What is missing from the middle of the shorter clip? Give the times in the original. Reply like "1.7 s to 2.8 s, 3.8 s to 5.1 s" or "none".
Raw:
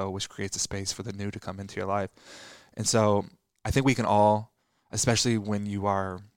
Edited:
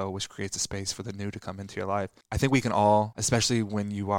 2.2 s to 3.5 s, 4.5 s to 4.9 s

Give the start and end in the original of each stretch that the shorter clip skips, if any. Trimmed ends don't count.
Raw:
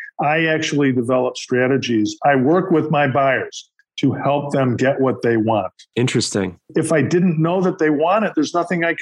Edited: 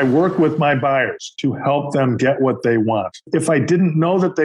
3.6 s to 3.8 s, 5.8 s to 6.6 s

